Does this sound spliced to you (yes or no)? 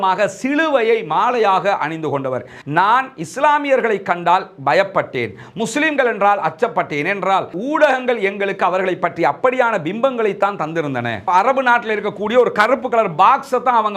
yes